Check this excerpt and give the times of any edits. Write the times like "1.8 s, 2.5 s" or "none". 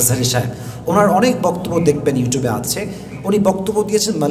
3.1 s